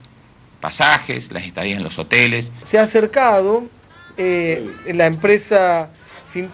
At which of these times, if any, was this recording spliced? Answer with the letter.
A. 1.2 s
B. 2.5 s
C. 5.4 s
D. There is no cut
B